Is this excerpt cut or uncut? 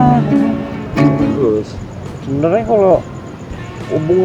cut